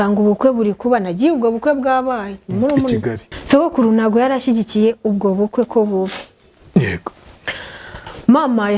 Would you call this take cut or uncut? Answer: cut